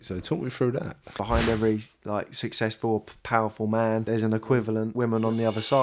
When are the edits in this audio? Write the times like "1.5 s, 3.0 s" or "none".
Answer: 1.2 s, 4.0 s, 4.9 s